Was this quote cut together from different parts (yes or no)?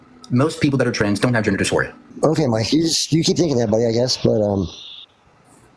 yes